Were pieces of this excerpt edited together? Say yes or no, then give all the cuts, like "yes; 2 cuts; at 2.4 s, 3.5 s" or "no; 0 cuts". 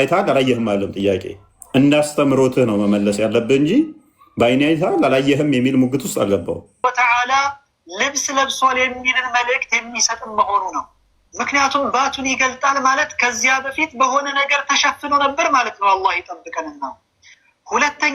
yes; 1 cut; at 6.8 s